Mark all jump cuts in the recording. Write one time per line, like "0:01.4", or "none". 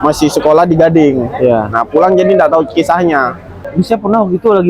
0:03.6

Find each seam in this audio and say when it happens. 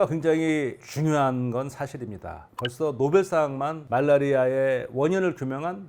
none

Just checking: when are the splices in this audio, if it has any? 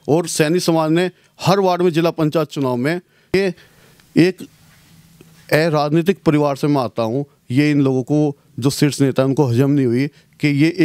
0:03.3

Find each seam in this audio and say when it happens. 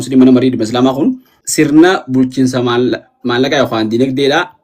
0:01.4

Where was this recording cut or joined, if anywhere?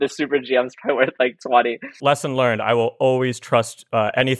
0:02.0

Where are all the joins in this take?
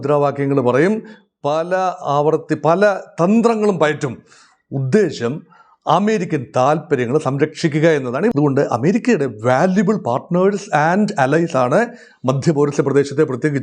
0:08.3

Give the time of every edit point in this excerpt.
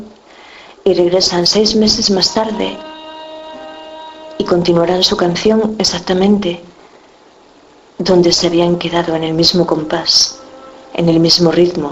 0:03.8

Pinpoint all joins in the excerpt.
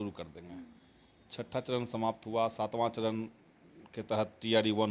none

